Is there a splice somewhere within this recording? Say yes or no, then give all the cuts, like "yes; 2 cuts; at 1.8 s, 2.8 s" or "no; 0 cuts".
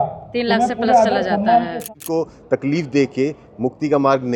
yes; 1 cut; at 1.9 s